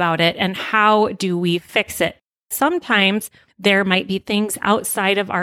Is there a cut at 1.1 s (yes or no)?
no